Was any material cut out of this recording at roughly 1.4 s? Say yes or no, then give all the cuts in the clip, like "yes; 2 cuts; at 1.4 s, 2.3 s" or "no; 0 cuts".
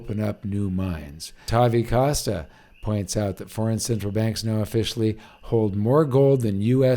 yes; 1 cut; at 1.4 s